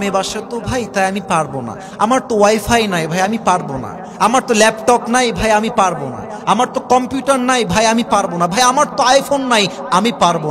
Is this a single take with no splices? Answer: yes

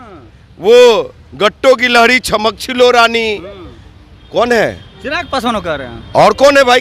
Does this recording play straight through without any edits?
yes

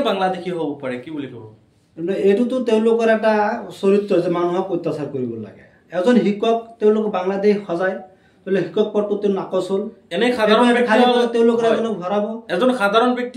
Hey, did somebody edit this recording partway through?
no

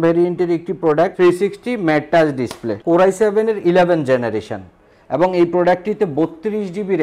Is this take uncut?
no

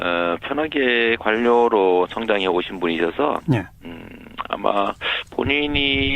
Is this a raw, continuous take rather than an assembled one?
no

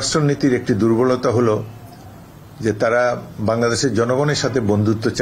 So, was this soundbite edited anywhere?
no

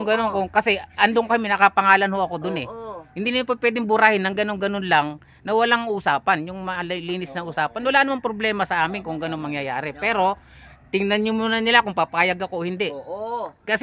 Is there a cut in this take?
no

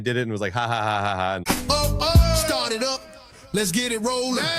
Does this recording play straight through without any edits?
no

